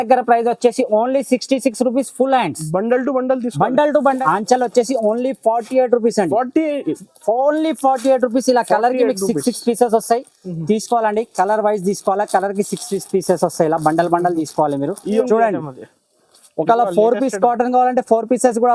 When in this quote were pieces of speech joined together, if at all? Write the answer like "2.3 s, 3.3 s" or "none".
4.2 s, 15.2 s